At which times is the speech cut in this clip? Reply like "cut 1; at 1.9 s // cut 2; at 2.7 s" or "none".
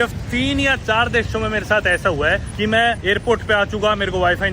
cut 1; at 2.7 s